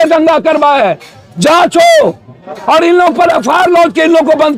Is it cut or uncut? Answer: uncut